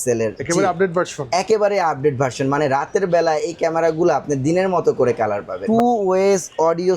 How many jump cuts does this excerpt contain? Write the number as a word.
one